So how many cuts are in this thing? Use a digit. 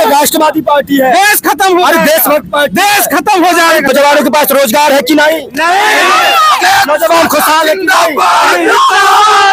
0